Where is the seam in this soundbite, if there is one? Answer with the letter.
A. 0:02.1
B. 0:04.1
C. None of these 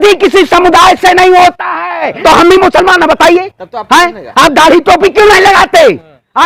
A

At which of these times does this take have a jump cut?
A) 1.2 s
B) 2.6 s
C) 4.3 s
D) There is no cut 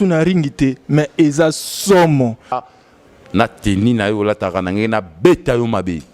B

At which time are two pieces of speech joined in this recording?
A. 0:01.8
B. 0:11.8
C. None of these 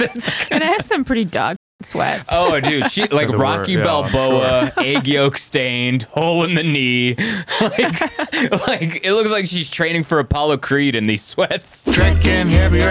B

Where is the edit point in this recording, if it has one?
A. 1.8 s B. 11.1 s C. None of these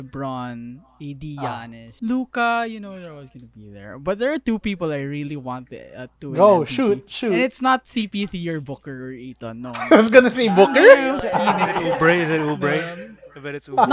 A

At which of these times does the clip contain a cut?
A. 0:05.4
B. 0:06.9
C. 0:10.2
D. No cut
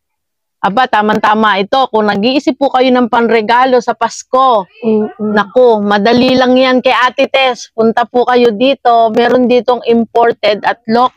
D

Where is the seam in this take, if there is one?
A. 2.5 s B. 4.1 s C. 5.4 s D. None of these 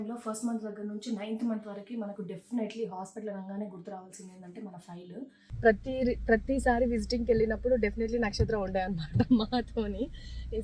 C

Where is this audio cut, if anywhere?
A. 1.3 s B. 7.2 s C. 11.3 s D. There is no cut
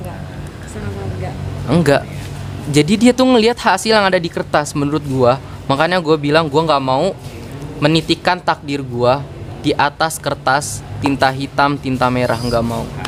D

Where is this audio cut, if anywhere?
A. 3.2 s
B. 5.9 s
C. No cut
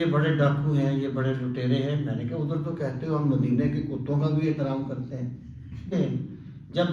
B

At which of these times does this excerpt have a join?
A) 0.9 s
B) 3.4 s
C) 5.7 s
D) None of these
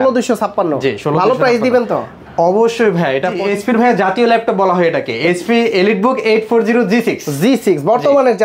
B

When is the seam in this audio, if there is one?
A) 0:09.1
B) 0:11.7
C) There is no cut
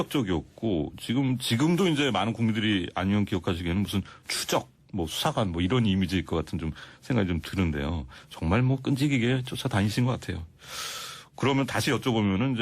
A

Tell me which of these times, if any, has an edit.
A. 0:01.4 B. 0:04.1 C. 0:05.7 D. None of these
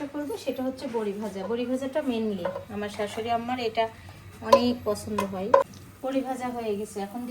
C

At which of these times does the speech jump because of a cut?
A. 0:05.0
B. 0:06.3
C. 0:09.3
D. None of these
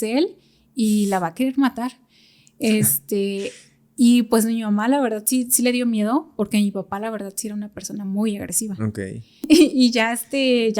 C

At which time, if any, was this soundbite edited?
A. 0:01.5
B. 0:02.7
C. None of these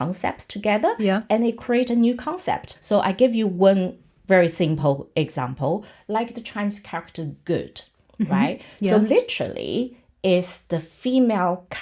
B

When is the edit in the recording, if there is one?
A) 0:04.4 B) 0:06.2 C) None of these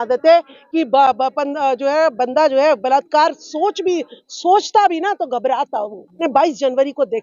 B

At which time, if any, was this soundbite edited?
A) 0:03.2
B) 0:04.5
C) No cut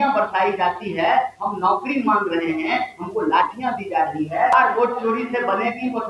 B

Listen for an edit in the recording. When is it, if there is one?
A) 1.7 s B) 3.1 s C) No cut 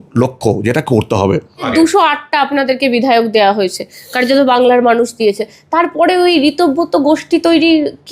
A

